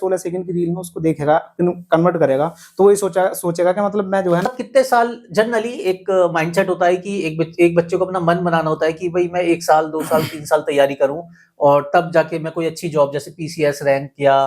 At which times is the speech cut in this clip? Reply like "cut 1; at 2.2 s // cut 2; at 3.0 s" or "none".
cut 1; at 4.5 s